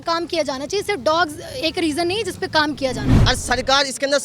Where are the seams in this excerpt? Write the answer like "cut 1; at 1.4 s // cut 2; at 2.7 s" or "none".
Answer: cut 1; at 3.1 s